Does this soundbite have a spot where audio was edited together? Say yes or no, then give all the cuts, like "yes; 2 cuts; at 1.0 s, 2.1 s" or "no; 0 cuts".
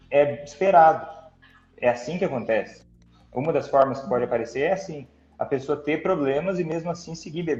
no; 0 cuts